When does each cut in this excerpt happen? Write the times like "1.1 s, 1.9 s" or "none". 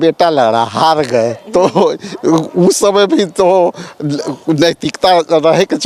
none